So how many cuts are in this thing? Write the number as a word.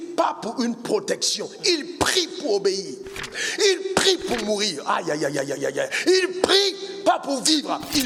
zero